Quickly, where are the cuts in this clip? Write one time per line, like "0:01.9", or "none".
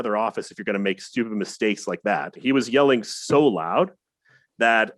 0:02.4